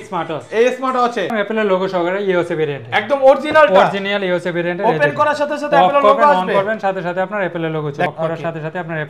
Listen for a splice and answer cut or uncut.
cut